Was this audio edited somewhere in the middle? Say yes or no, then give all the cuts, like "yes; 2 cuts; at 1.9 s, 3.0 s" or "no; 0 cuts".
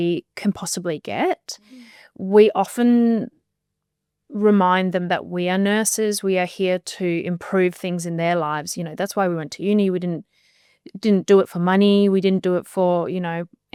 no; 0 cuts